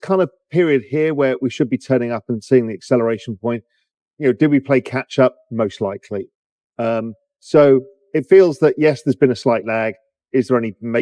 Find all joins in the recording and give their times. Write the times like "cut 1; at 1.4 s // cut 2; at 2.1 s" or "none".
none